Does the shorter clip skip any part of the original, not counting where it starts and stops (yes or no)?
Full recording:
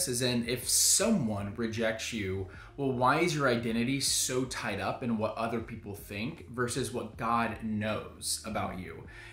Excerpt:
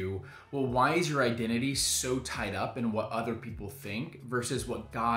no